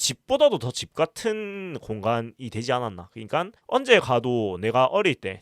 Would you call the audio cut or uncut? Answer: cut